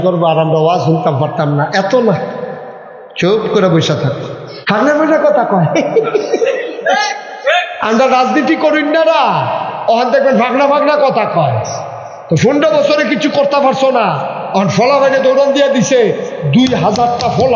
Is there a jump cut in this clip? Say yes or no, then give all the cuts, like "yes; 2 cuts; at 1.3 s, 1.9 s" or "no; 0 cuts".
yes; 1 cut; at 4.5 s